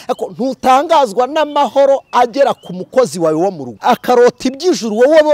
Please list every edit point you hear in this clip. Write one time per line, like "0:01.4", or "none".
0:03.7